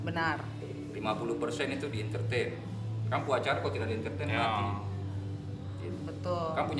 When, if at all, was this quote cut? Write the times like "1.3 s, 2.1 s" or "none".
none